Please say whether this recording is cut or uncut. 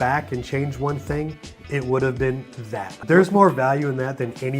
cut